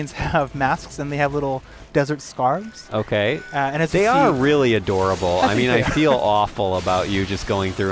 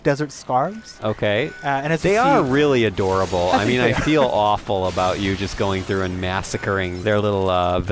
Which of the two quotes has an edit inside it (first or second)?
second